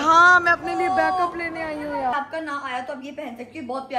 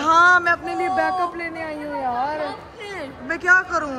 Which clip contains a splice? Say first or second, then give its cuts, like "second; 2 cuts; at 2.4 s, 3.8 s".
first; 1 cut; at 2.1 s